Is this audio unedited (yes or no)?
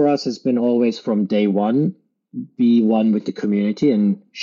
yes